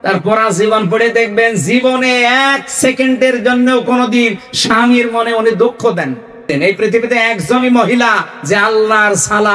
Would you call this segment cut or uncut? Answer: cut